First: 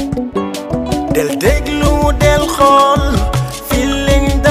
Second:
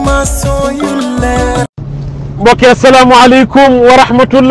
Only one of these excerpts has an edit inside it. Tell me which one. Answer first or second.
second